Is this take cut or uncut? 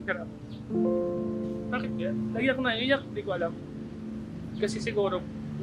uncut